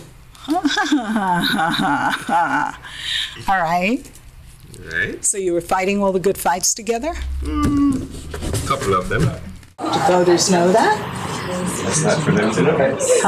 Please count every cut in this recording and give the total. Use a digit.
1